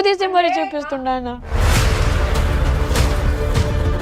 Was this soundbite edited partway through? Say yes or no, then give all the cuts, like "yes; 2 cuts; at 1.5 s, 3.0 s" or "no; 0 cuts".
no; 0 cuts